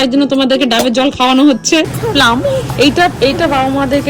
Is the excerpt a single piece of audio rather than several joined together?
no; 1 cut; at 1.9 s

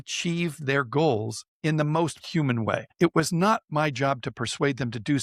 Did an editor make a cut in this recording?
yes; 1 cut; at 2.2 s

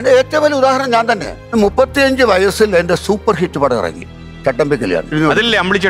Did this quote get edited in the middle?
yes; 3 cuts; at 1.5 s, 4.1 s, 5.1 s

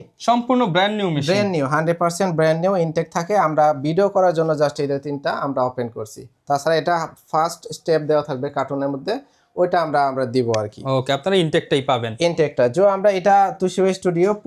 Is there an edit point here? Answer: no; 0 cuts

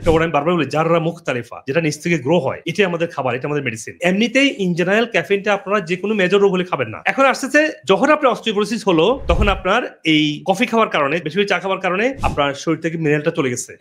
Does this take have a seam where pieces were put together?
yes; 1 cut; at 3.8 s

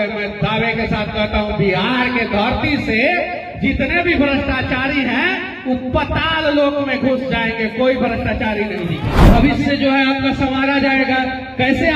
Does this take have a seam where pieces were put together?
yes; 1 cut; at 9.1 s

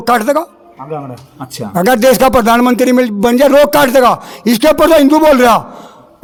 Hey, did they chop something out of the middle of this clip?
no; 0 cuts

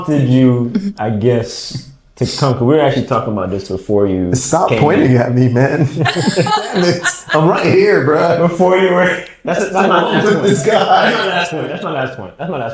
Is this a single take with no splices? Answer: yes; 0 cuts

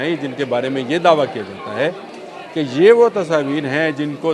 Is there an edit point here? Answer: no; 0 cuts

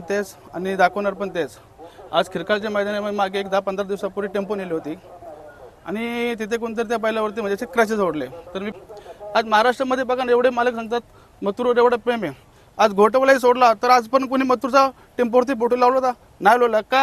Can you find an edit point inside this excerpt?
yes; 1 cut; at 8.7 s

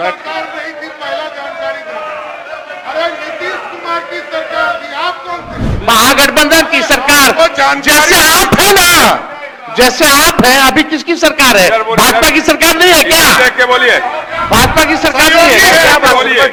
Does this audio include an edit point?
no; 0 cuts

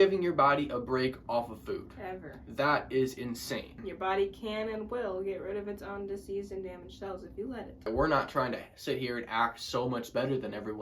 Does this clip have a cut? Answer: yes; 2 cuts; at 3.8 s, 7.9 s

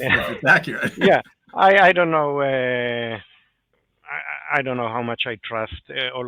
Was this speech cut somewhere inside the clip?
no; 0 cuts

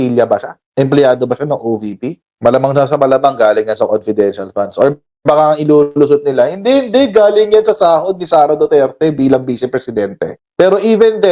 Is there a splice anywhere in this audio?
no; 0 cuts

